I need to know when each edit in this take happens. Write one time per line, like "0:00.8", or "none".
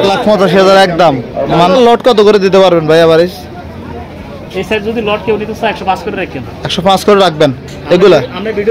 0:01.7